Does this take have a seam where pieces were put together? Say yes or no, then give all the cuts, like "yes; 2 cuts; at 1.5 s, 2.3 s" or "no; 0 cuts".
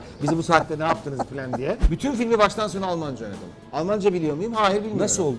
yes; 1 cut; at 1.8 s